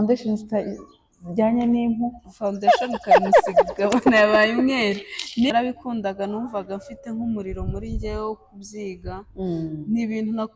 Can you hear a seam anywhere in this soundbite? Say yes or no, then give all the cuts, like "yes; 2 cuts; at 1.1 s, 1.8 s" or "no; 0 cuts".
yes; 1 cut; at 5.5 s